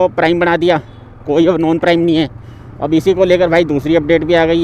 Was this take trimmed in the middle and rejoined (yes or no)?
no